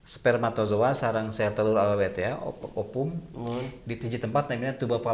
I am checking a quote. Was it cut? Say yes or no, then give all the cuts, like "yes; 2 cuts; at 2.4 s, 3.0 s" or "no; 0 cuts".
no; 0 cuts